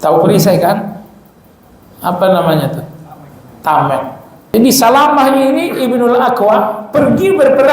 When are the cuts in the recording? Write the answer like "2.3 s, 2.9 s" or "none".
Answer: 4.5 s